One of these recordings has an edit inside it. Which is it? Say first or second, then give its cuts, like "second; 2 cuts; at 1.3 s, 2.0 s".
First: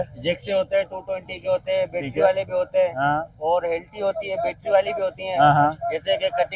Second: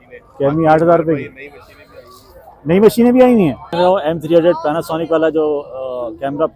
second; 1 cut; at 3.7 s